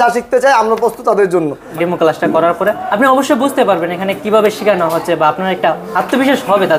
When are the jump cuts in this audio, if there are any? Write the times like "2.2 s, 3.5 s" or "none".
1.6 s, 2.9 s